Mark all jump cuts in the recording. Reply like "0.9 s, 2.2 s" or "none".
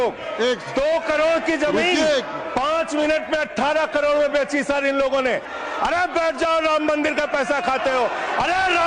5.5 s